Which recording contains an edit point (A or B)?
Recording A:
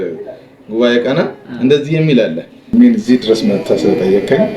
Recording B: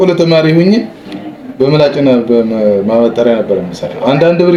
A